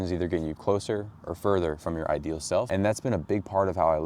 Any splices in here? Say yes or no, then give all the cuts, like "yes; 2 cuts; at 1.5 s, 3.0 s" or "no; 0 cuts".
yes; 1 cut; at 2.7 s